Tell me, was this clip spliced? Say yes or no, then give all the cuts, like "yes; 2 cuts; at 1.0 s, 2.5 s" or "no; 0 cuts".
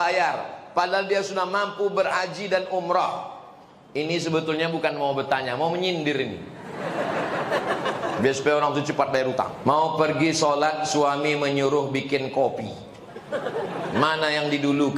yes; 1 cut; at 9.5 s